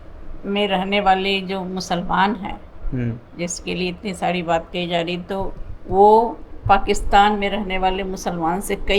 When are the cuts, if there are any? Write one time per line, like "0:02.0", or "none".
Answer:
none